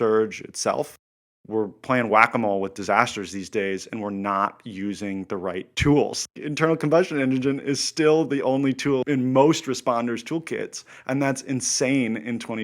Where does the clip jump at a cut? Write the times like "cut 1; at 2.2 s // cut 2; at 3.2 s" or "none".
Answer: cut 1; at 1.0 s // cut 2; at 6.2 s // cut 3; at 9.0 s